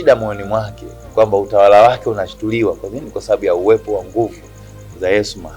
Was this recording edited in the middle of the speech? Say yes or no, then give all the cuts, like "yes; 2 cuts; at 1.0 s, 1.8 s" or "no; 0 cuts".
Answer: no; 0 cuts